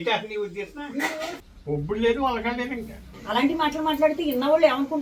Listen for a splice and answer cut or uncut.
cut